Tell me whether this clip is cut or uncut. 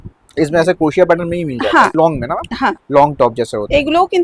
cut